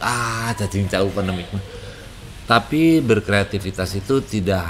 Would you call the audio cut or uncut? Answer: uncut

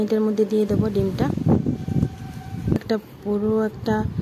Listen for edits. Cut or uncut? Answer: cut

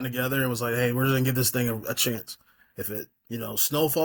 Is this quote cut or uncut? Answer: uncut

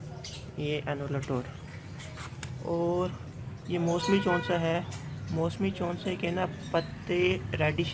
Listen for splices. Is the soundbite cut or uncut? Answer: uncut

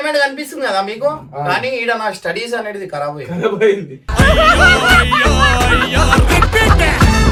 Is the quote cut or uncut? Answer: uncut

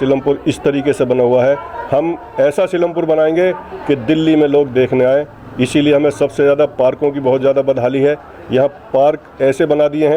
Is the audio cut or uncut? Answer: uncut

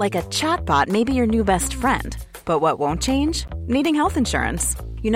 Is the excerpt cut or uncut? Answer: uncut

